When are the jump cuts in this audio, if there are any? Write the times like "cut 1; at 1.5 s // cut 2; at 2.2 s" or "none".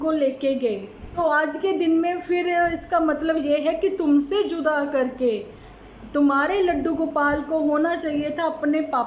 cut 1; at 1.0 s